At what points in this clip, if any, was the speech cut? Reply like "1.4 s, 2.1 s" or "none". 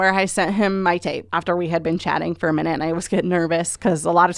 1.3 s